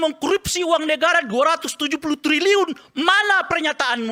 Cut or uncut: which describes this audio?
uncut